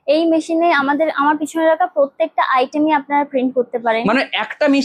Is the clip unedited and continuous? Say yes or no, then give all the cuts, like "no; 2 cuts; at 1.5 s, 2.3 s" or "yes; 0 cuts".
yes; 0 cuts